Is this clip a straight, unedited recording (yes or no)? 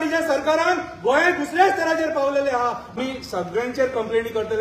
no